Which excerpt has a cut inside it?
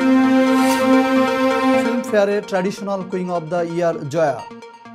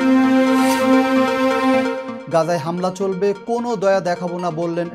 first; 1 cut; at 1.8 s

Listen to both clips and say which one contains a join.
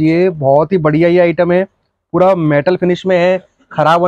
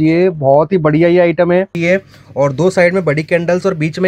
second; 1 cut; at 1.8 s

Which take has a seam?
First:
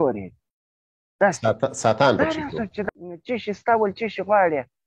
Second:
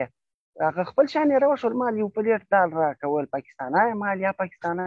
first; 1 cut; at 2.8 s

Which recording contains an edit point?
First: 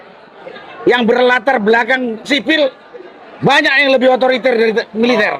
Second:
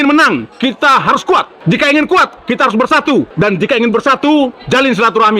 second; 3 cuts; at 1.5 s, 3.3 s, 4.6 s

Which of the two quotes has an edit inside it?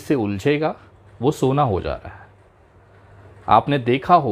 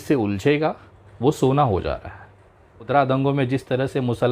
second; 1 cut; at 2.9 s

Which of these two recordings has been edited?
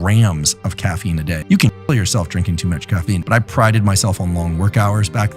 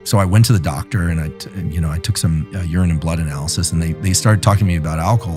first; 2 cuts; at 1.4 s, 3.2 s

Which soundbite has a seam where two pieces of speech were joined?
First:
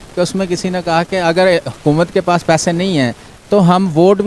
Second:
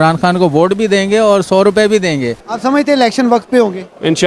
second; 1 cut; at 2.4 s

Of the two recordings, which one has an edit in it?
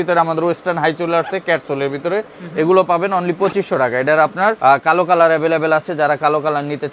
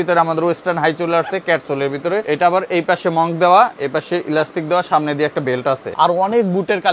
second; 2 cuts; at 2.2 s, 5.9 s

